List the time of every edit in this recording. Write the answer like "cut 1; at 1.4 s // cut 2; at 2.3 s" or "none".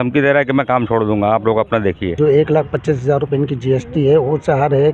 cut 1; at 2.2 s

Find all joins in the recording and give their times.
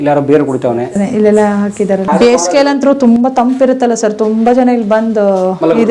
cut 1; at 2.1 s

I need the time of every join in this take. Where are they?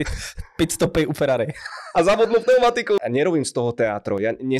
cut 1; at 3.0 s

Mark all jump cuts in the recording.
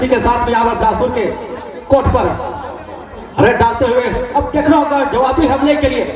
none

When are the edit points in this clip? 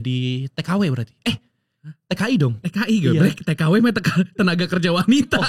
none

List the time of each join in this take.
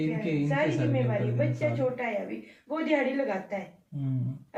none

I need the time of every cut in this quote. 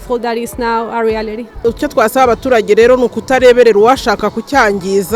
cut 1; at 1.5 s

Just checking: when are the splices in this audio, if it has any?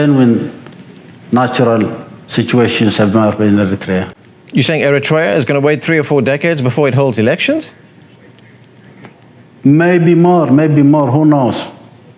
none

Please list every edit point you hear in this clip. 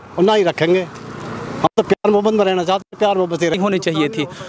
cut 1; at 3.5 s

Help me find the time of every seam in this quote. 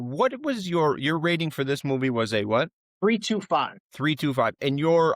cut 1; at 2.8 s // cut 2; at 3.8 s

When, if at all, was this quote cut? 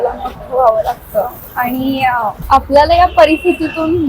cut 1; at 2.4 s

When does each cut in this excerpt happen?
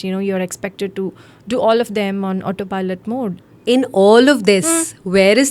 cut 1; at 3.4 s

